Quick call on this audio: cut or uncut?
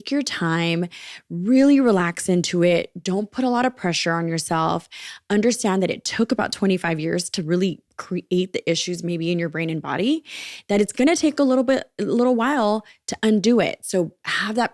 uncut